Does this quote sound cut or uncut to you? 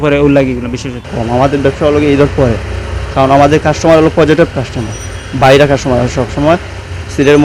cut